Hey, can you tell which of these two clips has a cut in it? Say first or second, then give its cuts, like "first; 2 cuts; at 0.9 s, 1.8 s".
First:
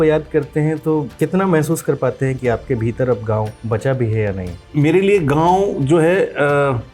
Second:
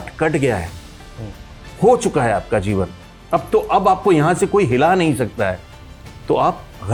first; 3 cuts; at 1.1 s, 3.6 s, 4.6 s